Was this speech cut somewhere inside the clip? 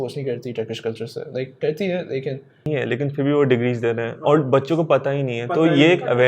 yes; 1 cut; at 2.7 s

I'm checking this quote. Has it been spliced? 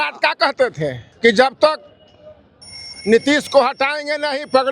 yes; 1 cut; at 1.0 s

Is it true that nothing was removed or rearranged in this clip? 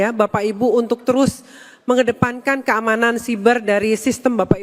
yes; 0 cuts

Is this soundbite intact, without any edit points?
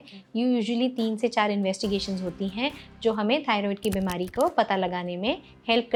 yes; 0 cuts

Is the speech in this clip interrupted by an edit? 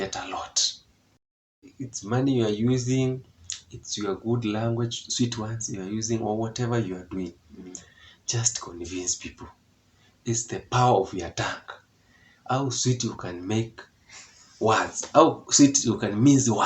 yes; 1 cut; at 1.6 s

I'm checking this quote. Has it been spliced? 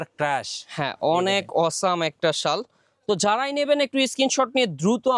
no; 0 cuts

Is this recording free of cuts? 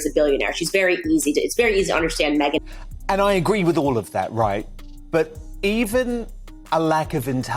no; 1 cut; at 2.6 s

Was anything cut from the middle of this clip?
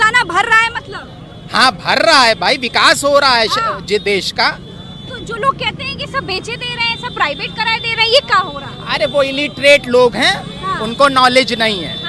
no; 0 cuts

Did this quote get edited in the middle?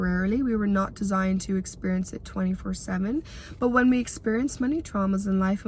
no; 0 cuts

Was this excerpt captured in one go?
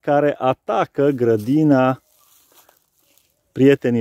yes; 0 cuts

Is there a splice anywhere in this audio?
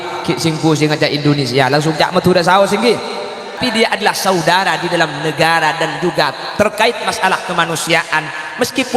yes; 1 cut; at 3.6 s

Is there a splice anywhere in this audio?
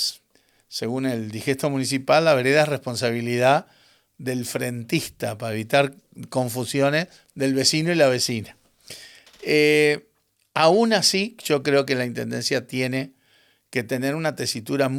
no; 0 cuts

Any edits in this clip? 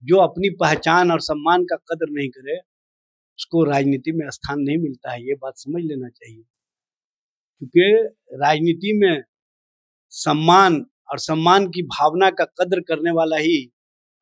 no; 0 cuts

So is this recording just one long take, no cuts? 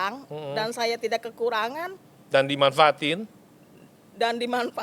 yes; 0 cuts

